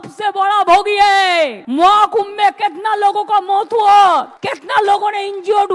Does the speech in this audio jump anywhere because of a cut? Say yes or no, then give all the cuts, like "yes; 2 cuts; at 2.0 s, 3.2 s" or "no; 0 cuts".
no; 0 cuts